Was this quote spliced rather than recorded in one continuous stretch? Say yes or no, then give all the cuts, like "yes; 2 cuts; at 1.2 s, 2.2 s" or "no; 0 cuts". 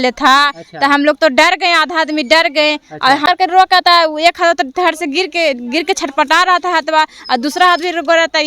yes; 1 cut; at 3.2 s